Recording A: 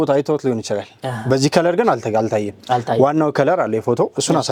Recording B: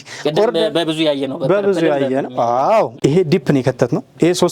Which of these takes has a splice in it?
B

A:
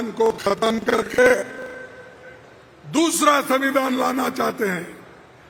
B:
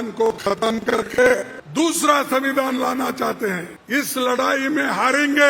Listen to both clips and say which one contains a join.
B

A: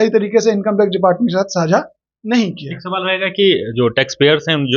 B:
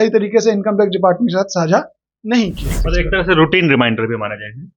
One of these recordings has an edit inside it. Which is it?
B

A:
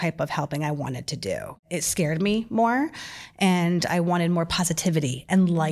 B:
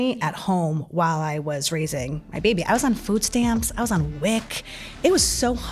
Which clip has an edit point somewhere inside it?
A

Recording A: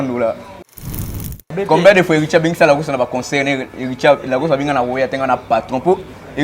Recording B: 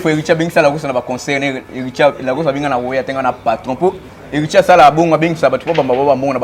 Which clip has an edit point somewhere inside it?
A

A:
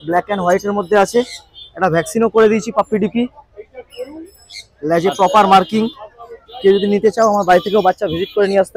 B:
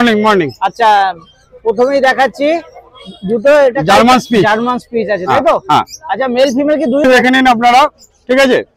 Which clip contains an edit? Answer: B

